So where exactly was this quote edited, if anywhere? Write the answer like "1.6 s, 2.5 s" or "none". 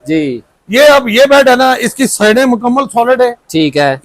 none